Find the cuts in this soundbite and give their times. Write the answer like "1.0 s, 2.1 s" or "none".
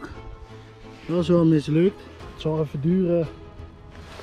2.2 s

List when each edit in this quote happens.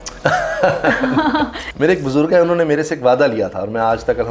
1.6 s

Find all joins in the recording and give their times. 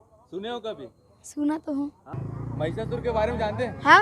2.4 s

